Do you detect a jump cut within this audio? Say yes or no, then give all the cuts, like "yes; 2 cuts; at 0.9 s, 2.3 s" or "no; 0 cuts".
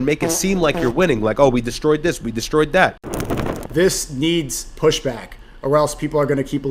yes; 1 cut; at 3.2 s